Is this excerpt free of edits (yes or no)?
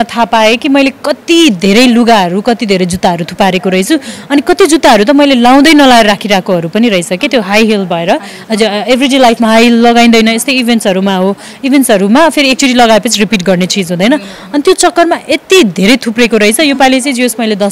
yes